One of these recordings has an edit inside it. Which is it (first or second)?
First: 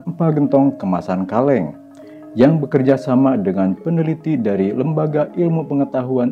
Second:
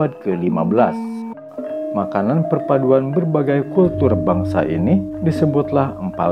second